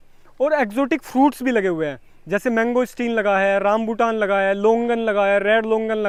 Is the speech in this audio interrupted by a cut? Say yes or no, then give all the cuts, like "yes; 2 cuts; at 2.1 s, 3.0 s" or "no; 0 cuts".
no; 0 cuts